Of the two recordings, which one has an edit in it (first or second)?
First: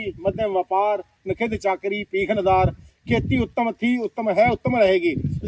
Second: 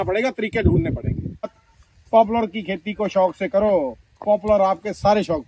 second